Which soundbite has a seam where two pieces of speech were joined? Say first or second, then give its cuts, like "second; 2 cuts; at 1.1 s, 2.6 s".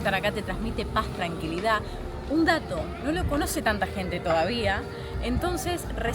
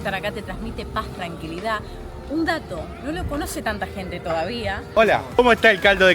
second; 1 cut; at 5.0 s